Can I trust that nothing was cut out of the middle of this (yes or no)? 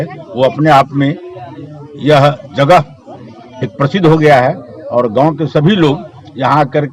yes